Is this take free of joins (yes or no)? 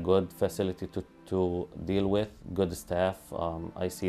yes